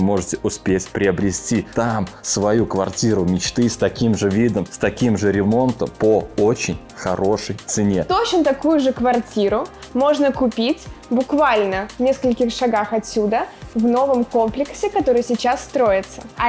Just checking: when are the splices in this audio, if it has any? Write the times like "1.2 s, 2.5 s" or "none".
8.1 s